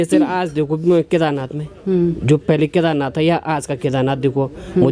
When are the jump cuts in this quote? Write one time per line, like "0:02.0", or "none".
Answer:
none